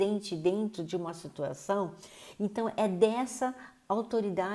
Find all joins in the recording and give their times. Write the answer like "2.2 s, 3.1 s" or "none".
none